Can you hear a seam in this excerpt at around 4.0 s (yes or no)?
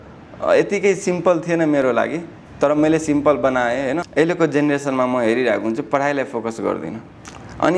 yes